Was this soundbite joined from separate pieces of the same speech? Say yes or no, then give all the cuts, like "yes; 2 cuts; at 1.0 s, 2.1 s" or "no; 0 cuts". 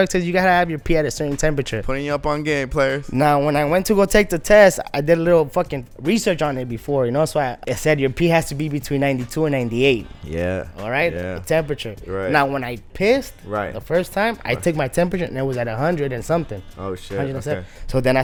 no; 0 cuts